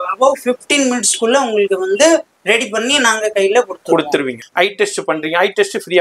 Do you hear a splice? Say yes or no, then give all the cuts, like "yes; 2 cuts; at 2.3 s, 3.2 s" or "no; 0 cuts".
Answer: yes; 1 cut; at 4.4 s